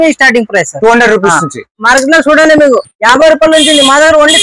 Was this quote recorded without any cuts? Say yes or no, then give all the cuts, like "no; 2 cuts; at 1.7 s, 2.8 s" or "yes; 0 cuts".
no; 1 cut; at 1.7 s